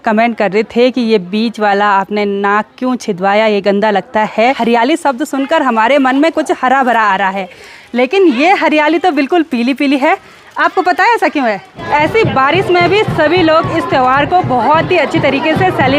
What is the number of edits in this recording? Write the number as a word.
two